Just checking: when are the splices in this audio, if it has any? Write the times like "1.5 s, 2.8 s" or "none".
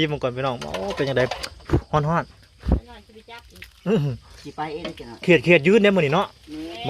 none